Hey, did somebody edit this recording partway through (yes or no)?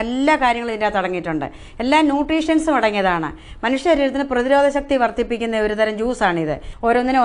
no